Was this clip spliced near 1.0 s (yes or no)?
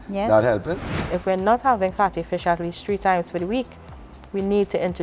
yes